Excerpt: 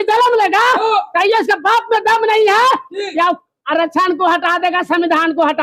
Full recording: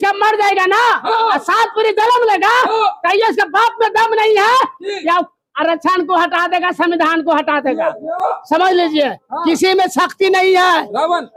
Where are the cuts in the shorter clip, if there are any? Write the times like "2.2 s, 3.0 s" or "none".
none